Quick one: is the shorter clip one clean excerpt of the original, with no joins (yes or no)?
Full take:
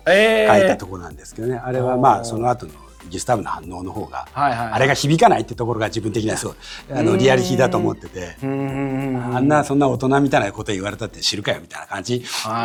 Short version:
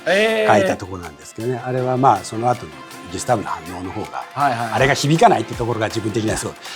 yes